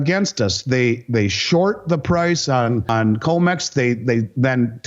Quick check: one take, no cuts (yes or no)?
no